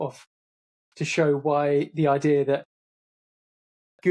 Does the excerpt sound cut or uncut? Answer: uncut